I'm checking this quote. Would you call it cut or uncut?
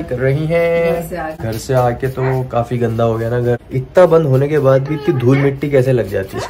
cut